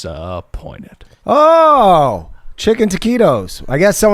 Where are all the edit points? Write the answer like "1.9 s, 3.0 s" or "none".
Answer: 1.1 s